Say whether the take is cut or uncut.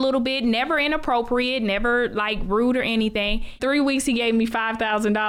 cut